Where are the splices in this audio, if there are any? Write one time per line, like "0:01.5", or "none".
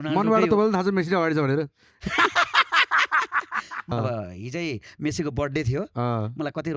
0:03.9